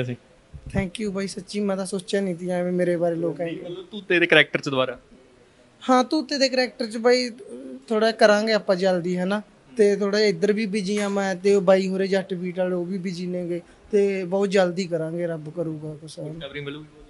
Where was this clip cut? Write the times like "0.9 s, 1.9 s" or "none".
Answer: none

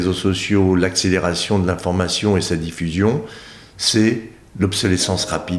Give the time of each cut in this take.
none

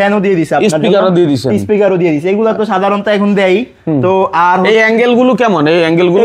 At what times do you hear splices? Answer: none

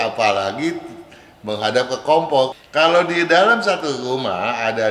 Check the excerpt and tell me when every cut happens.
2.6 s

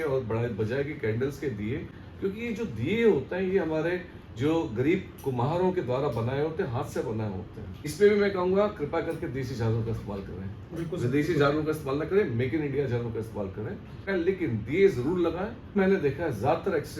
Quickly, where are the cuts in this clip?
7.9 s, 14.0 s, 15.7 s

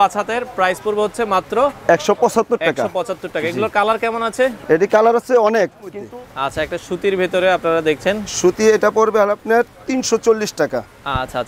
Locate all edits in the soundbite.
6.1 s

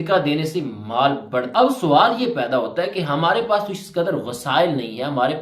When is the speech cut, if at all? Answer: 1.5 s

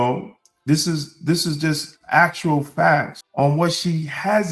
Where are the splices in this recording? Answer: 3.2 s

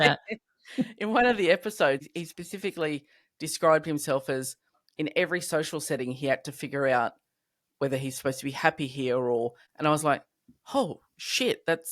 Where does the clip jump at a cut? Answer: 2.0 s, 9.6 s

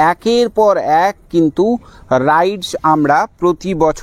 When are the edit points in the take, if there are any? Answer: none

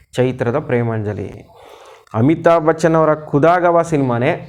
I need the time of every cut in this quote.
none

